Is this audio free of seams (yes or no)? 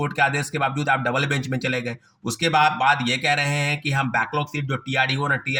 yes